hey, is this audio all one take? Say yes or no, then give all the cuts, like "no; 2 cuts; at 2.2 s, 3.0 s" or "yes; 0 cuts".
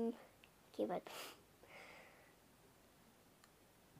yes; 0 cuts